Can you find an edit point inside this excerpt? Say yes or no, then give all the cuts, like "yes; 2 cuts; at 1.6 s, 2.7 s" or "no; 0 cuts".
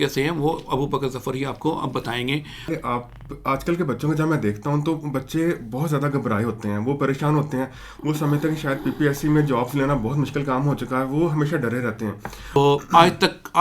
yes; 2 cuts; at 2.7 s, 12.6 s